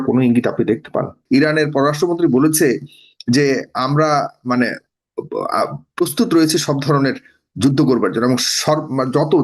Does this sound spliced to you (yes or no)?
yes